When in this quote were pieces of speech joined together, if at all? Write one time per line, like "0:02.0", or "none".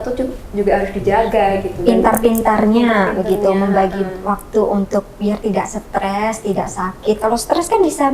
none